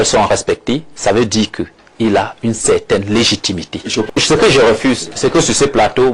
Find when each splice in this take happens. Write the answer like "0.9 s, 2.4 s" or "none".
4.2 s